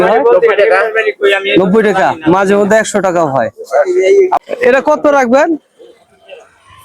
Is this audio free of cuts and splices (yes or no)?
no